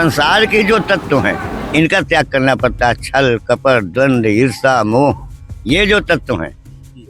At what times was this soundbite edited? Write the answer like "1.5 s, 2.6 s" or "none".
none